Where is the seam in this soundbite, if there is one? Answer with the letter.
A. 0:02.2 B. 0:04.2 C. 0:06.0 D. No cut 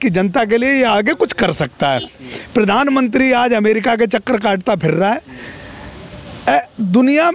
A